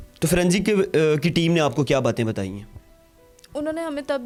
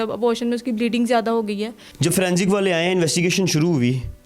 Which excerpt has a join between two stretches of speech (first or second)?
second